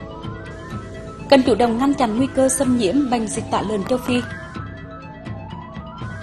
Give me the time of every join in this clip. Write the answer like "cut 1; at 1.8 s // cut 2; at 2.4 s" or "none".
cut 1; at 0.9 s